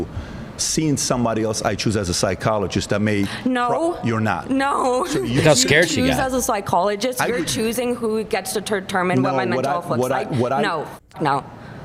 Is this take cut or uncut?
uncut